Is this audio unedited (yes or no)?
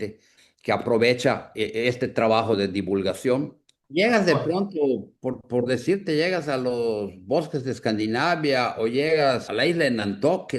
no